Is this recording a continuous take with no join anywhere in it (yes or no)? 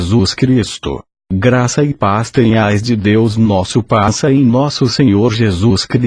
yes